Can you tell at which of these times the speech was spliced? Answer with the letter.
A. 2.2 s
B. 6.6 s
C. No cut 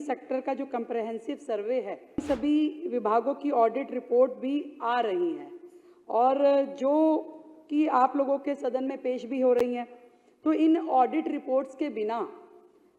A